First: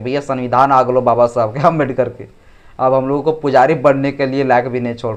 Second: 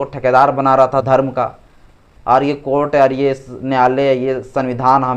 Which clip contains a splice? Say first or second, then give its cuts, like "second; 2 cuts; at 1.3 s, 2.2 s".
second; 1 cut; at 1.0 s